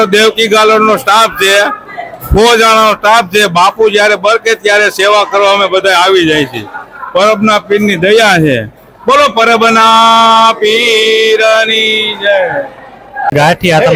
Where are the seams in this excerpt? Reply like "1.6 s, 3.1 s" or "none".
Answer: none